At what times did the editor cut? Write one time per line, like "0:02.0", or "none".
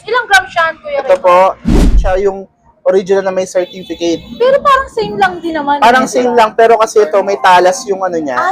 0:02.0